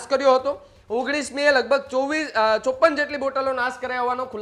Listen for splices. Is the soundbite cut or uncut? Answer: uncut